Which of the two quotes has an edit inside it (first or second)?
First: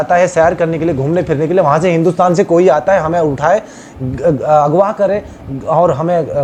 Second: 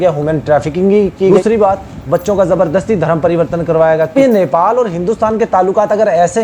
second